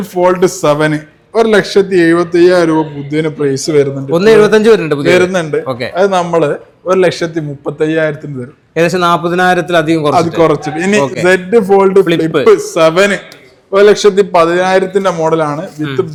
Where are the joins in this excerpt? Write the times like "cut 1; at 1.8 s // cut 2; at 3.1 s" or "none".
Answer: none